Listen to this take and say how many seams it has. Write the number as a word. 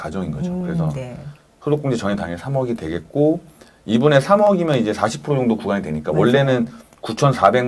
zero